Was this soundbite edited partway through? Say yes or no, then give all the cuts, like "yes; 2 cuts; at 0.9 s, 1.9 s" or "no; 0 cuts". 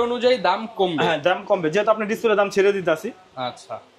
no; 0 cuts